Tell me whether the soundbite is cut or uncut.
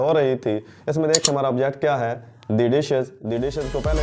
uncut